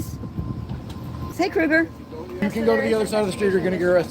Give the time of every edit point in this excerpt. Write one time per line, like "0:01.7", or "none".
0:01.3
0:02.4